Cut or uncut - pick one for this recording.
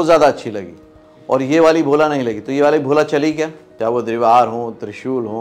cut